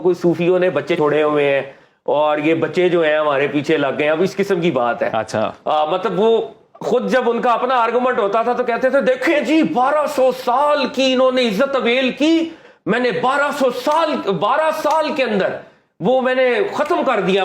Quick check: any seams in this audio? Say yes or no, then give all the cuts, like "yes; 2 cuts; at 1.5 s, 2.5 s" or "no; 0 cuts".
yes; 1 cut; at 0.9 s